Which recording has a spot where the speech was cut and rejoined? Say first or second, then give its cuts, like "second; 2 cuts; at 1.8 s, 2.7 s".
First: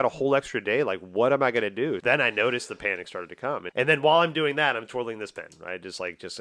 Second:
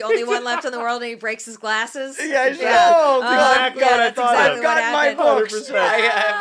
first; 2 cuts; at 2.0 s, 3.7 s